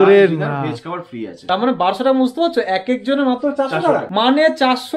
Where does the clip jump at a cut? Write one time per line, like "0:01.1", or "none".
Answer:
0:01.3
0:04.1